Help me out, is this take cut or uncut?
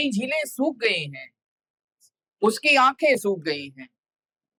uncut